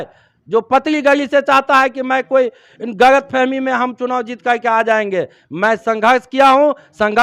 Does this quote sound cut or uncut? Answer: uncut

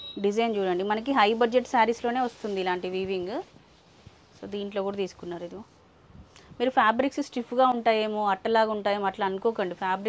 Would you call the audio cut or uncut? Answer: uncut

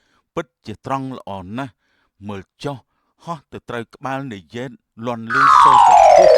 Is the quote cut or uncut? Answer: cut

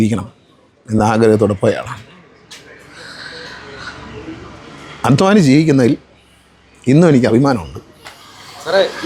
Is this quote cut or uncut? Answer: uncut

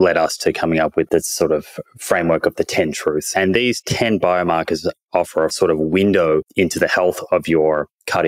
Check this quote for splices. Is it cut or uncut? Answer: cut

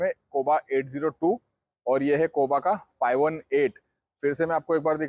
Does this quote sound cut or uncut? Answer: uncut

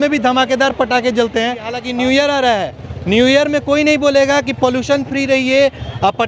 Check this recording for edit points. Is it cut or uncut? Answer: cut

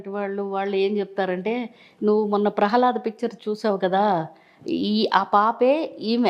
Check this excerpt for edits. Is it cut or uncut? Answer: uncut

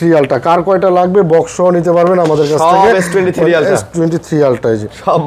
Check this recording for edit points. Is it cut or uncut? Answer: uncut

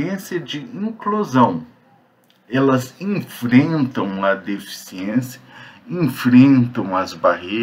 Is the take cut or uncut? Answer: uncut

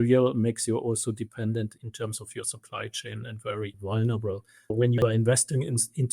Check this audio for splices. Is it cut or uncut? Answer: cut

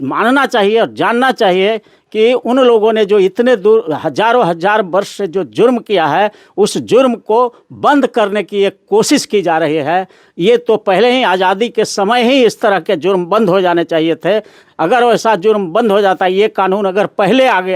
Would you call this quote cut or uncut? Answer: uncut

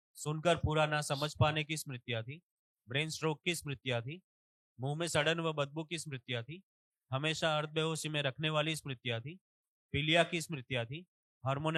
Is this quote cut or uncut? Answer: uncut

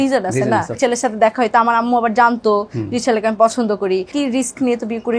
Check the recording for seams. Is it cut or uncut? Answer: cut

